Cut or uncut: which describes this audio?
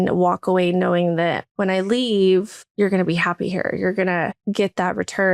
cut